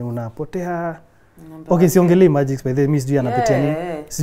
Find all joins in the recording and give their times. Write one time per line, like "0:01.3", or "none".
none

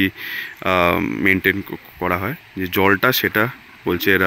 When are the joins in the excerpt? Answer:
none

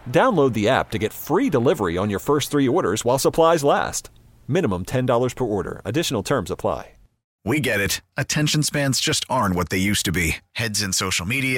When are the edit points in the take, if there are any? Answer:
0:07.3

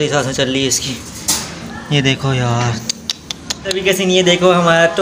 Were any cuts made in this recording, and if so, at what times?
0:03.8

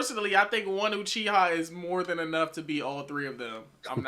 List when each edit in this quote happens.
none

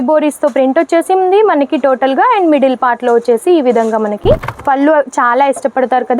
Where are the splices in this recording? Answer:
0:04.5

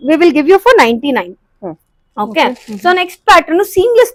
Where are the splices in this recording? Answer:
none

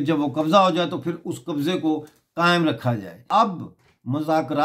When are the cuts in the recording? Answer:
0:03.2

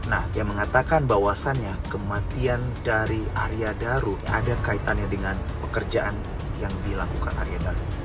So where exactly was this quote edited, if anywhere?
none

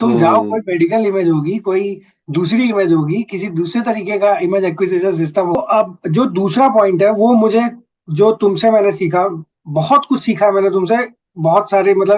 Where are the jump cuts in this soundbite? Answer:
0:05.6

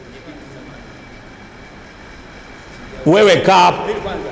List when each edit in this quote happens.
none

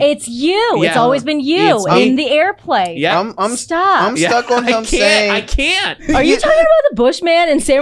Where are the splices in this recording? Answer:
0:06.0

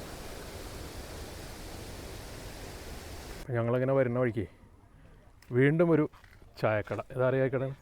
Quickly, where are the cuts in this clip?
0:03.4

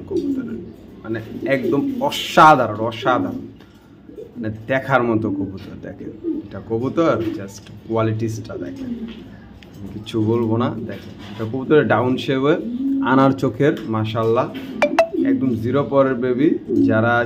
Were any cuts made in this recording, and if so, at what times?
none

